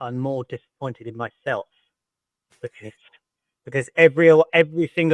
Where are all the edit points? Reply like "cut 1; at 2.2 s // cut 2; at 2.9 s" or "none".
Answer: none